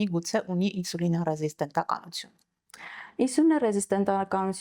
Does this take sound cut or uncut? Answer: uncut